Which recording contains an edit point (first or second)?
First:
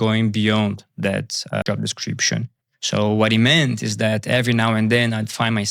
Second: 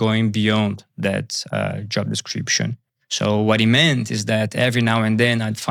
first